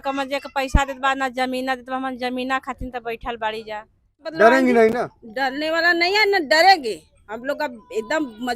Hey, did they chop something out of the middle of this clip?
yes; 1 cut; at 4.3 s

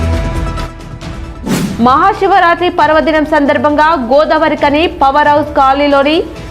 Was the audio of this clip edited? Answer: yes; 1 cut; at 1.2 s

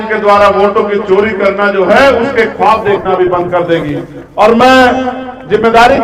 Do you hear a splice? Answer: no; 0 cuts

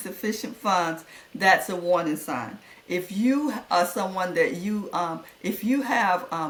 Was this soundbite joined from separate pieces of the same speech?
no; 0 cuts

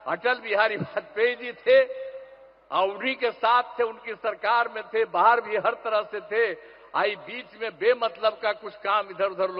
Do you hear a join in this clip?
no; 0 cuts

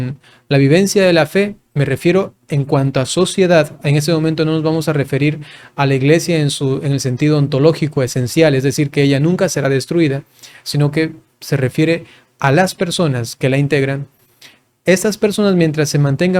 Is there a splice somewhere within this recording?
no; 0 cuts

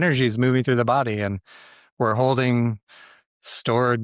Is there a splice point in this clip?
no; 0 cuts

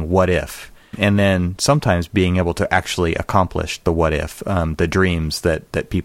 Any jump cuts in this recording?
yes; 1 cut; at 1.0 s

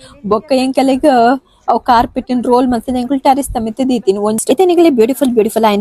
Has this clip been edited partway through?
yes; 1 cut; at 4.4 s

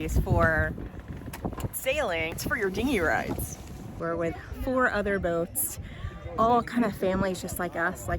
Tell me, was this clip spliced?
yes; 2 cuts; at 2.4 s, 4.0 s

